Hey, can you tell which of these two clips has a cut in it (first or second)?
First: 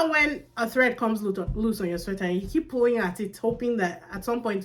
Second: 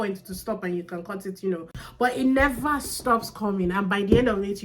second